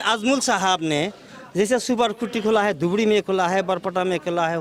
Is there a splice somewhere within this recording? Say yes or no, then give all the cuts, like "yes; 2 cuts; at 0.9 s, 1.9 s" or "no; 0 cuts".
no; 0 cuts